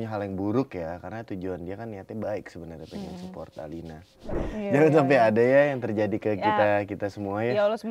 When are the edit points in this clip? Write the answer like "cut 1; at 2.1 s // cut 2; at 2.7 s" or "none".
cut 1; at 4.4 s

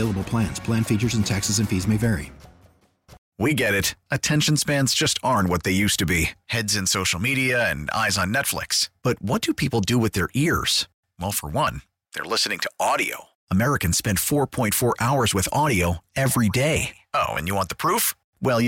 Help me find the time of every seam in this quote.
cut 1; at 3.2 s

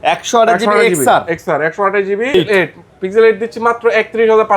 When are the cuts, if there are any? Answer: cut 1; at 2.3 s

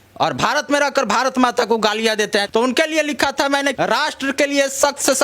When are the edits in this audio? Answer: cut 1; at 2.5 s // cut 2; at 3.7 s

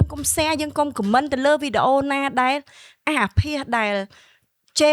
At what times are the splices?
none

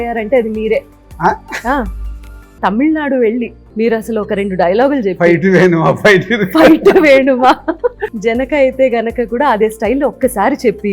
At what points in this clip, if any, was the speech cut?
cut 1; at 2.5 s // cut 2; at 3.6 s // cut 3; at 8.1 s

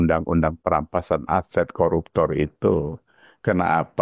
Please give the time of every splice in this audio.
none

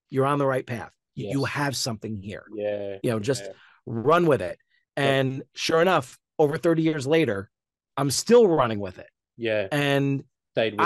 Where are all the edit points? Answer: none

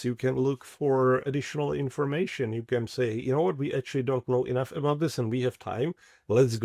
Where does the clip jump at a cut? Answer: cut 1; at 1.3 s

